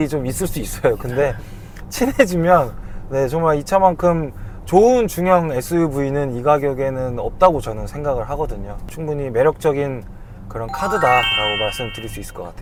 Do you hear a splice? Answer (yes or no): no